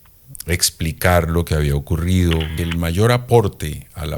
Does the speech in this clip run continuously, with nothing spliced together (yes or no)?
no